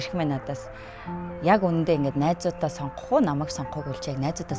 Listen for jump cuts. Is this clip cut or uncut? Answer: uncut